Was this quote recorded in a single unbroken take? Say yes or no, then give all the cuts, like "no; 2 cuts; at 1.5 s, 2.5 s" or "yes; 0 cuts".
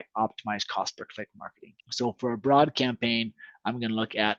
yes; 0 cuts